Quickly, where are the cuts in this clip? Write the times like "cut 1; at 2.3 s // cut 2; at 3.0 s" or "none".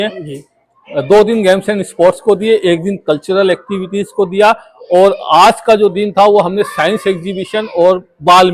none

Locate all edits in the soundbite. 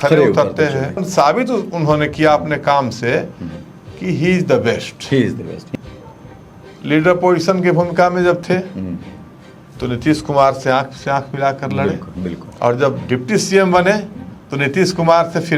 cut 1; at 1.1 s // cut 2; at 5.6 s

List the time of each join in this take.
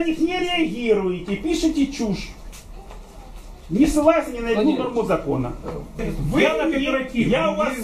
cut 1; at 5.9 s

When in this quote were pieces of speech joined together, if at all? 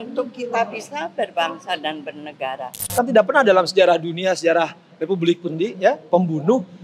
cut 1; at 2.7 s

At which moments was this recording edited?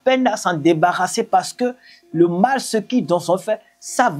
none

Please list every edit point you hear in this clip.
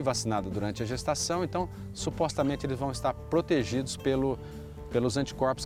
none

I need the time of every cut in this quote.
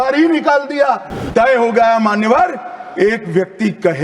cut 1; at 1.2 s

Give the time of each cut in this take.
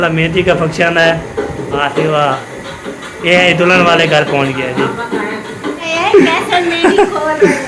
cut 1; at 1.8 s // cut 2; at 5.9 s

